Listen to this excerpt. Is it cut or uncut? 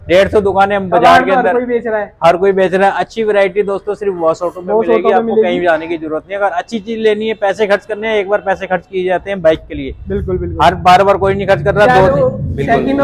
uncut